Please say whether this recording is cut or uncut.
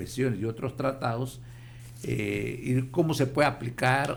uncut